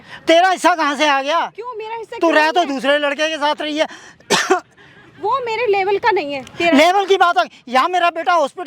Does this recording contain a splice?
no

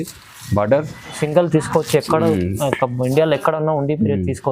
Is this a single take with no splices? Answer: no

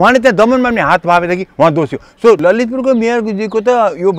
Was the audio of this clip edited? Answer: yes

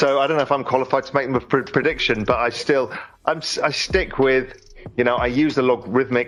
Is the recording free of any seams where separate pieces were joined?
yes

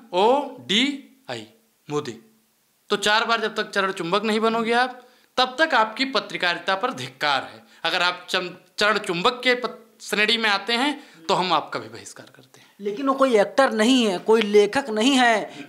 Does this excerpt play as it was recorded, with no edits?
yes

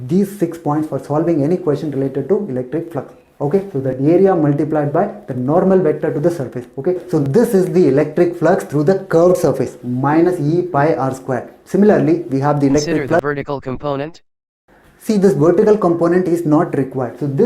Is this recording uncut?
no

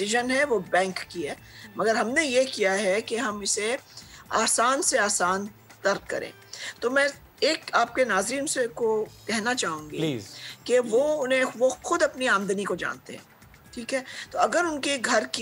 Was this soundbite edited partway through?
no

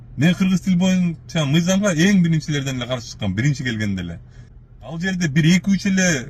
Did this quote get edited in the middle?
yes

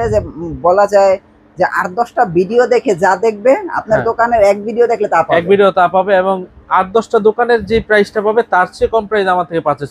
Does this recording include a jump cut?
no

